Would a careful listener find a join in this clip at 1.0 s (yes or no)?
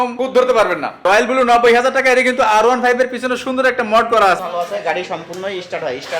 yes